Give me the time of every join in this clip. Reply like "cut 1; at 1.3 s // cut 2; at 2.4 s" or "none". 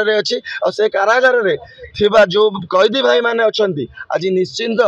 none